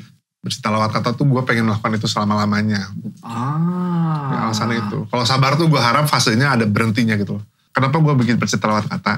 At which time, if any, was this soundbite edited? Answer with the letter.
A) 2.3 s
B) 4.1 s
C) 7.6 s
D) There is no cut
C